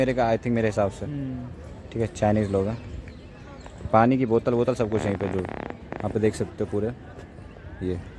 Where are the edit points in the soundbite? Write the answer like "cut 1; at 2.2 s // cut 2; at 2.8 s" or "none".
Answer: none